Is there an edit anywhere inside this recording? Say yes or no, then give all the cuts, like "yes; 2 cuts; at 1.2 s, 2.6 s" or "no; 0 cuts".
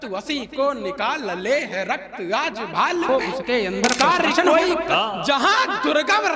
yes; 1 cut; at 4.9 s